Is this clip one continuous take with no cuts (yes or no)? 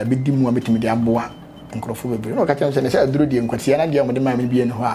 yes